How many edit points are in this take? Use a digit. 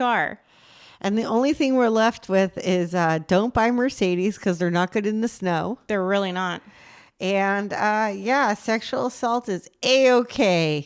0